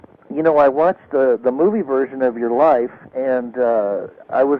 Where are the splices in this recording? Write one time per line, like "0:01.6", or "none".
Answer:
none